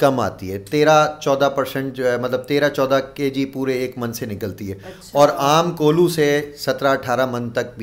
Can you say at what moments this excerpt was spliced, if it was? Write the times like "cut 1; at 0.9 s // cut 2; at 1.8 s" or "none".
none

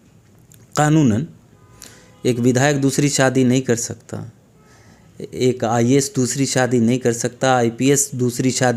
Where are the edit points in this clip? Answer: none

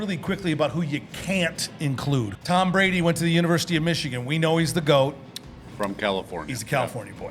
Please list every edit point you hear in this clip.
cut 1; at 2.3 s

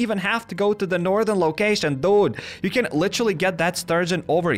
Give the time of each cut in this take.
none

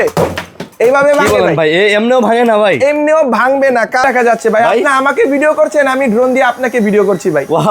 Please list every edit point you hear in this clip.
cut 1; at 4.0 s

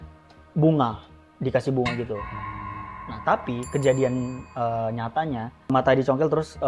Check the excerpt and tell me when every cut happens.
cut 1; at 5.7 s

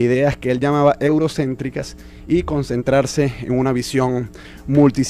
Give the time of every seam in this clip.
cut 1; at 3.6 s

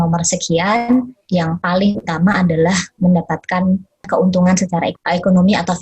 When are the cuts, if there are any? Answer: cut 1; at 1.2 s // cut 2; at 4.1 s // cut 3; at 4.9 s

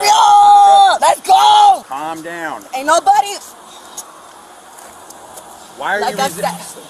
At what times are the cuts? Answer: cut 1; at 1.0 s // cut 2; at 2.0 s

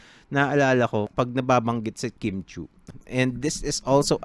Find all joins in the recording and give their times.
cut 1; at 1.1 s // cut 2; at 2.8 s

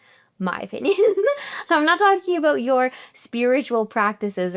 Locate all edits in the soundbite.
cut 1; at 1.5 s

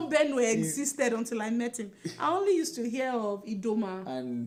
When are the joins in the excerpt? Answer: none

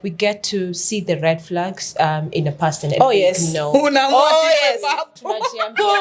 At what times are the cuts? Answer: none

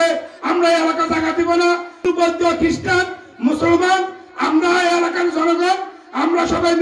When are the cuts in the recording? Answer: cut 1; at 2.1 s

